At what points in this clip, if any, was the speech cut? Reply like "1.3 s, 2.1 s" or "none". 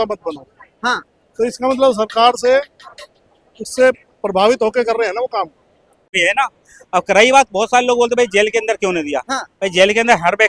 6.1 s